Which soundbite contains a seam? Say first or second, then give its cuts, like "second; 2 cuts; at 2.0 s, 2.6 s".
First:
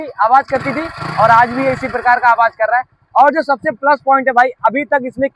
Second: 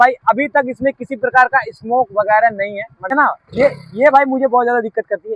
second; 1 cut; at 3.1 s